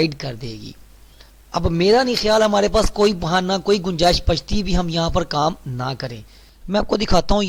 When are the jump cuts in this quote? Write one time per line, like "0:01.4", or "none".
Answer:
none